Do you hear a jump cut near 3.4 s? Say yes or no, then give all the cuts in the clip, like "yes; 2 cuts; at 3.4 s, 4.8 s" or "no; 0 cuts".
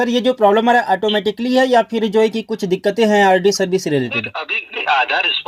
no; 0 cuts